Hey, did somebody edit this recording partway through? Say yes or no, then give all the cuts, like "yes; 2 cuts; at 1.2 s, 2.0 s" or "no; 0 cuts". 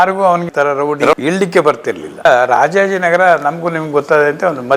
yes; 1 cut; at 2.2 s